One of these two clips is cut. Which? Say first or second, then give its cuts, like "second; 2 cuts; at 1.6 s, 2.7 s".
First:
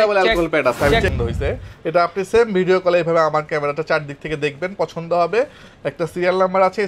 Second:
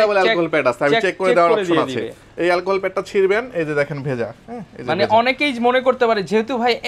first; 1 cut; at 1.1 s